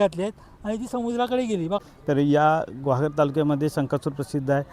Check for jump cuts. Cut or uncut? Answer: cut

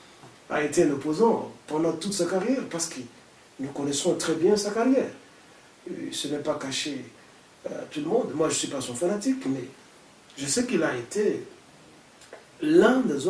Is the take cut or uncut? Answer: uncut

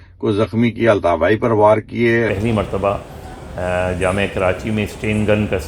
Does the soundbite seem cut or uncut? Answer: cut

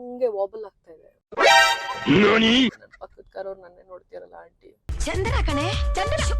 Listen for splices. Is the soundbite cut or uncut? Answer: cut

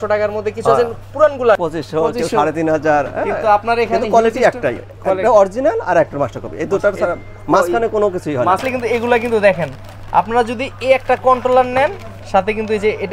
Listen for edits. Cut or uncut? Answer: cut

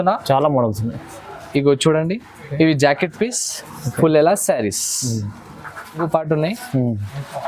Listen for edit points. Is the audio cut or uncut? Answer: cut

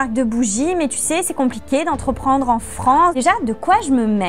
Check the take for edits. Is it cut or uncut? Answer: cut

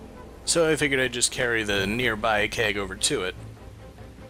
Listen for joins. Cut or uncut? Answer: uncut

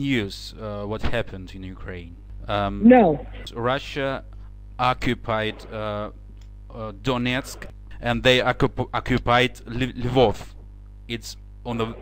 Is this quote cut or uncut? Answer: uncut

